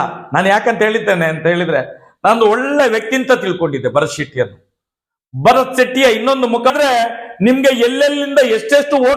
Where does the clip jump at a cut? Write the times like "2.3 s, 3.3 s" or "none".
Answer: 6.7 s